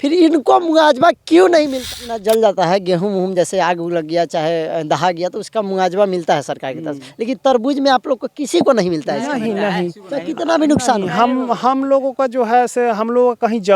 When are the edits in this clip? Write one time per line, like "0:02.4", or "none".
0:01.8

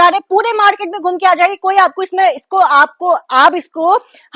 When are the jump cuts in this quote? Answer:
none

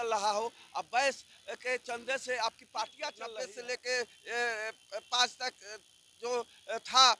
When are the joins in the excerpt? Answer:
0:03.2

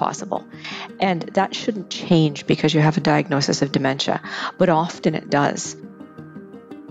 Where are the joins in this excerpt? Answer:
0:05.9

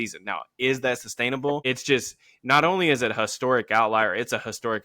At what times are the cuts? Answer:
0:01.6

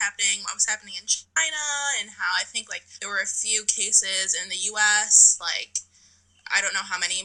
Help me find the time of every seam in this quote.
none

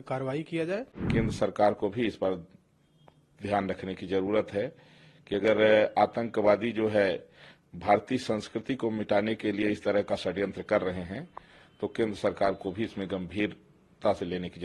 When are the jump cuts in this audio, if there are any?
0:01.0

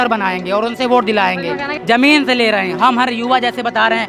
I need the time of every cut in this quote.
0:01.7

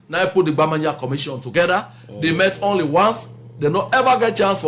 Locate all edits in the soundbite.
none

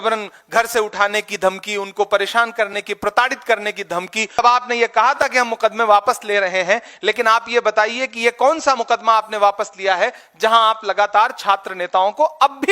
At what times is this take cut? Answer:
0:04.4

